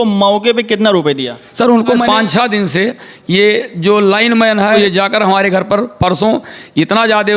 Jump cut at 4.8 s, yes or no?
yes